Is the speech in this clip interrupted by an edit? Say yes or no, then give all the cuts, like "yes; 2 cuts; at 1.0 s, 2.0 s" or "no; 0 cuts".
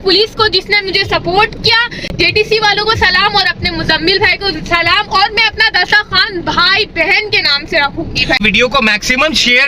no; 0 cuts